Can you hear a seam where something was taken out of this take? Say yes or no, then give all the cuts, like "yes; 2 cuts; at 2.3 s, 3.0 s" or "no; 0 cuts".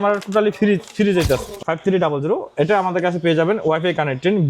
yes; 1 cut; at 1.5 s